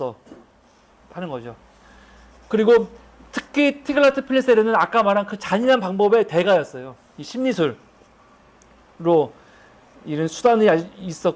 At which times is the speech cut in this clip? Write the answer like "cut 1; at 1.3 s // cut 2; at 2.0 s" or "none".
cut 1; at 5.9 s